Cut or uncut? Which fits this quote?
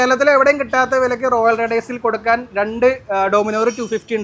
uncut